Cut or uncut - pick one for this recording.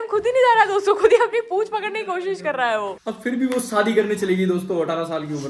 cut